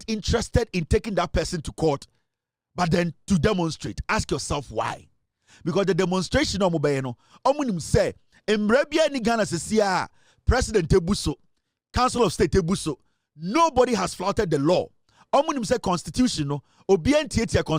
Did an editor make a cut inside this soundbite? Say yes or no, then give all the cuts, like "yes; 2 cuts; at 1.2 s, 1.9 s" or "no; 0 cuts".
no; 0 cuts